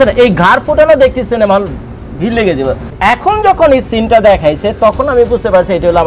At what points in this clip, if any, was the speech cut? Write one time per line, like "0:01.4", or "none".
0:02.9